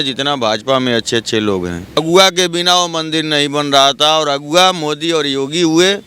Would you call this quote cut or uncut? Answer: cut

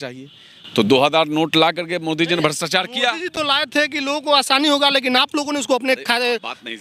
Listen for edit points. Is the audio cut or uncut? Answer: uncut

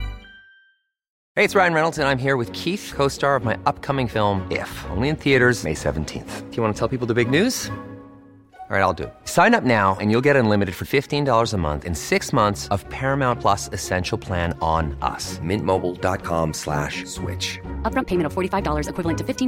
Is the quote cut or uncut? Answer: cut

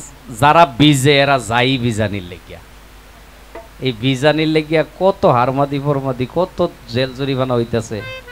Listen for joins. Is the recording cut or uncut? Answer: uncut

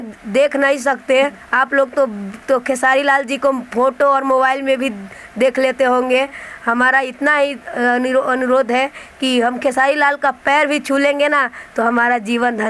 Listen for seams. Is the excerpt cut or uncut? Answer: cut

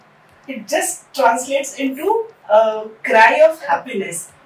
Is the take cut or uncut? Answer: cut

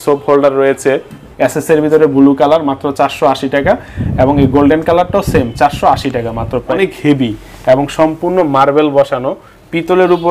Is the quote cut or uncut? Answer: cut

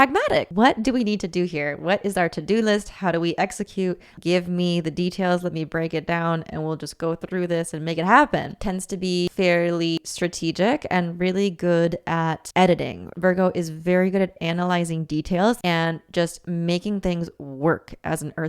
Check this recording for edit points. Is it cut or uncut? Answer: cut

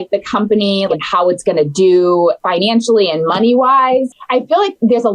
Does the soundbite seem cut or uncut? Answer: cut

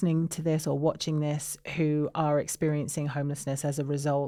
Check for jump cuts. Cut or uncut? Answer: uncut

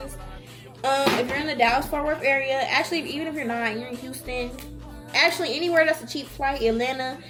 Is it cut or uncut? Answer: uncut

